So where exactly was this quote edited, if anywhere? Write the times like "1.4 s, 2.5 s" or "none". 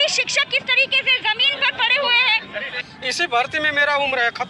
2.8 s